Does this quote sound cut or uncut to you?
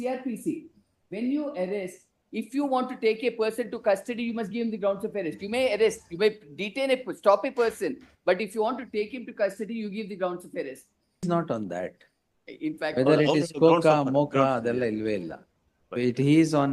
cut